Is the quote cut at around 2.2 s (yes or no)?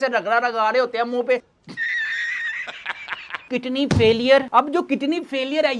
no